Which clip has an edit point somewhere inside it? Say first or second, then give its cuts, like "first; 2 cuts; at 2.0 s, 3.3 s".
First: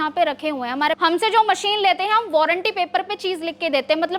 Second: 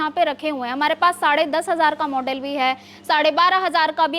first; 1 cut; at 1.0 s